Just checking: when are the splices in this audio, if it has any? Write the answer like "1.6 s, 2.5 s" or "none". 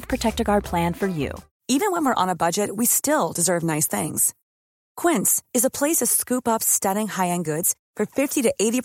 1.4 s